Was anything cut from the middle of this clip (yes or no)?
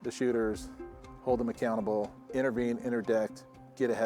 yes